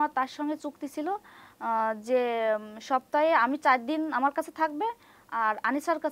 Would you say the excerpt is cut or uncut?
uncut